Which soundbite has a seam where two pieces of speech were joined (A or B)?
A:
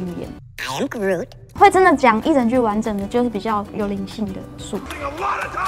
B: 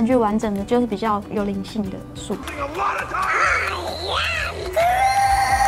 A